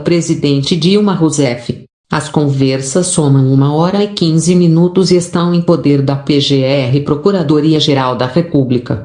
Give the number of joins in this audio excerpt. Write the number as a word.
one